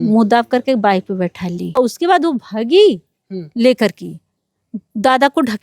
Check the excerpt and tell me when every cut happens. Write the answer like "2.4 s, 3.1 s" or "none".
1.8 s